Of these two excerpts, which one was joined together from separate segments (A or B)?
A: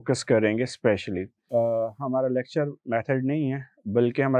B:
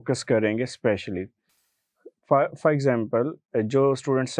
A